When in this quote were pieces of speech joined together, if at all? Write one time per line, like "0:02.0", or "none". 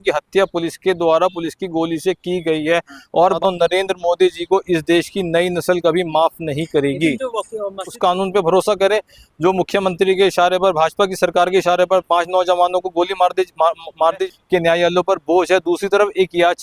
0:03.4
0:07.9
0:14.2